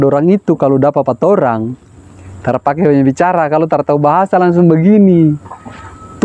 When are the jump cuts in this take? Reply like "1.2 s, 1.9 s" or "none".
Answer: none